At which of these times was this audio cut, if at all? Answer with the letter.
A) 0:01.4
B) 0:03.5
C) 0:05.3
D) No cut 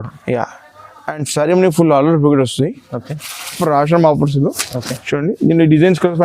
B